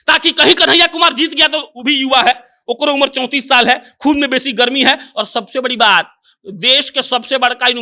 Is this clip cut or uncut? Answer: uncut